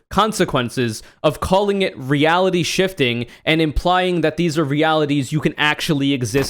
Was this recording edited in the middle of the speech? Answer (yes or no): no